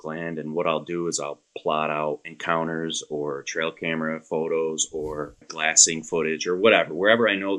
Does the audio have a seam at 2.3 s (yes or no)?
yes